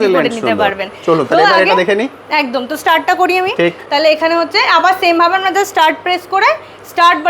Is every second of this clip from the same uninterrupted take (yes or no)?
yes